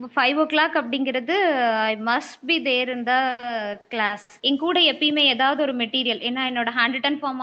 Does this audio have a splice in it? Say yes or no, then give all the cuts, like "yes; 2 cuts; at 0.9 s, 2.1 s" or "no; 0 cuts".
yes; 1 cut; at 4.3 s